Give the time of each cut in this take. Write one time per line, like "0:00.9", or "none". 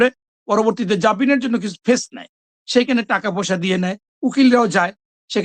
none